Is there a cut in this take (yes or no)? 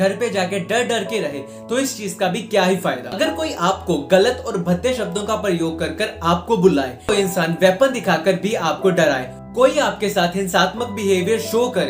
yes